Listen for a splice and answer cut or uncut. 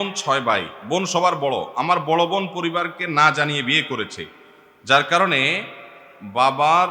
uncut